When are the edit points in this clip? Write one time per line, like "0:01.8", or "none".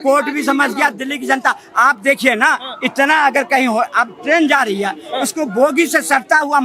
none

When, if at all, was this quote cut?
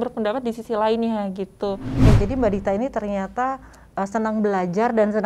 0:02.1

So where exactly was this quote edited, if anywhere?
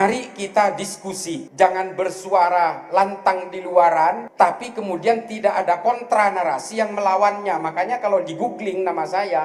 0:01.4
0:04.2

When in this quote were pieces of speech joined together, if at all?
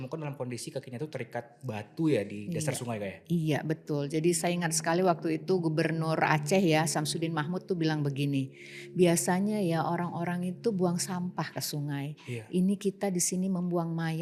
none

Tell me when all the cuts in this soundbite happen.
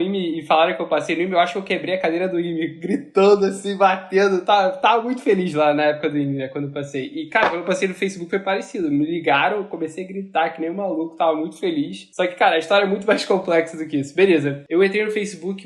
0:14.6

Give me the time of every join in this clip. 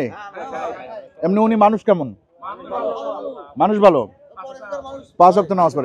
none

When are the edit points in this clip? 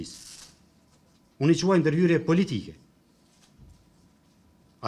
none

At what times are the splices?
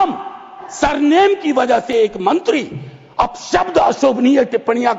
none

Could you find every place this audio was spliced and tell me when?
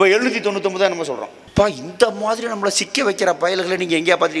0:01.3

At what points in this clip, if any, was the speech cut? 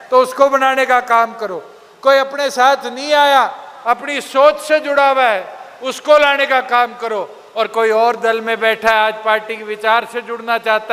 none

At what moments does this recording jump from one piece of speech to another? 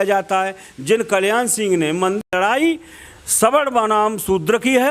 0:02.2

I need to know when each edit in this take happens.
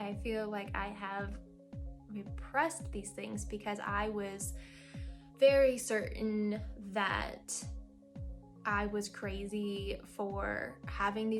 none

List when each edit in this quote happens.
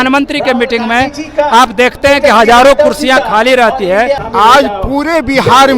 0:04.2

